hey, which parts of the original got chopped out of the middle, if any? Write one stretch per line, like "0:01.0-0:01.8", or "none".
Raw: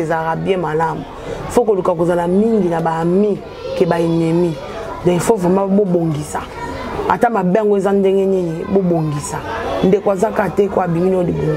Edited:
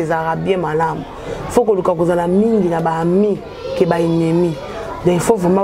none